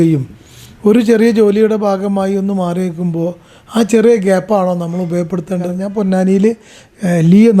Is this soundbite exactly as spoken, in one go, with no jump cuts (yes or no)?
no